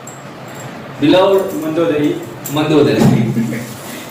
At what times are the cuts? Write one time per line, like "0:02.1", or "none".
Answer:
none